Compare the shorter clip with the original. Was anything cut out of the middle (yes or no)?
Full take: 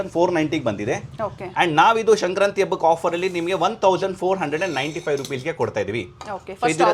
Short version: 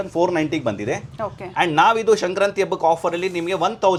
no